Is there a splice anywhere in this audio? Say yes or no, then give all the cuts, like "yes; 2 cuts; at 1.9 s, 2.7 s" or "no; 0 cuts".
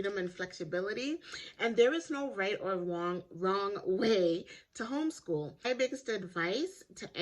yes; 1 cut; at 5.6 s